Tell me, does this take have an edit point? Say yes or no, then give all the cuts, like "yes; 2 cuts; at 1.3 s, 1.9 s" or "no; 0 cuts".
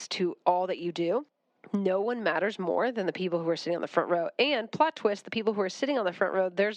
no; 0 cuts